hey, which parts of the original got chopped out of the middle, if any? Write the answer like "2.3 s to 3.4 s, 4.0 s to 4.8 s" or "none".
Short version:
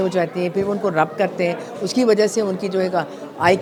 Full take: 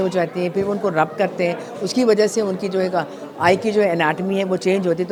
none